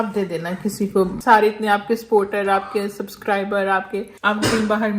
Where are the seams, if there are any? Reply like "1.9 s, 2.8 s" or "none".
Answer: 1.2 s, 4.2 s